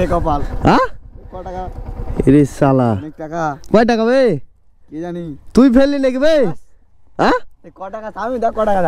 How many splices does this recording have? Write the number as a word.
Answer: zero